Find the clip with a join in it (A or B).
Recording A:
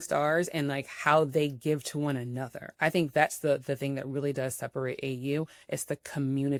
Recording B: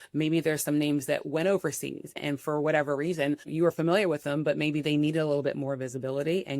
B